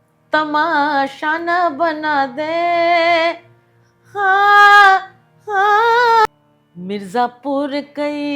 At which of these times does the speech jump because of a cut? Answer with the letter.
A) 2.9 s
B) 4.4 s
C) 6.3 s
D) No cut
C